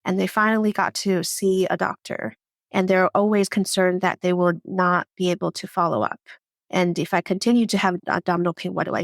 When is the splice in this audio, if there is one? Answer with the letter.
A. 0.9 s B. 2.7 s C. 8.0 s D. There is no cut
C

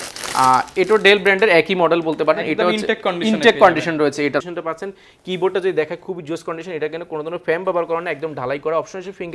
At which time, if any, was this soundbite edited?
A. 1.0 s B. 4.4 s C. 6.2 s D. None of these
B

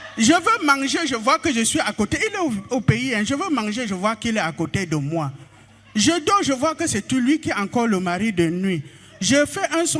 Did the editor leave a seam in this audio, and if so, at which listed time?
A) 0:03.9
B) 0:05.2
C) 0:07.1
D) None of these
D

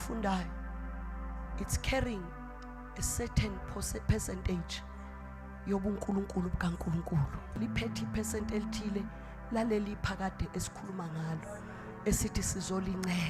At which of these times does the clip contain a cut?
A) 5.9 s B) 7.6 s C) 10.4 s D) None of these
B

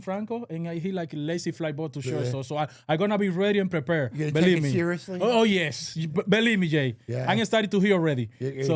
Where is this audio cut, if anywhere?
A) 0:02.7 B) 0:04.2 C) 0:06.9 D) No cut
D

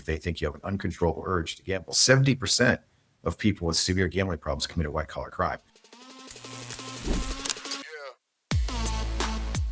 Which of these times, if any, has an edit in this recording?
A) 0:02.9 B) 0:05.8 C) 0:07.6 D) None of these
B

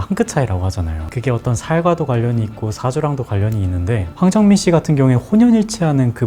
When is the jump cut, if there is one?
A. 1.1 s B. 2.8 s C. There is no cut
A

